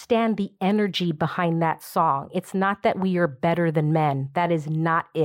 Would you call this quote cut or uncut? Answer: uncut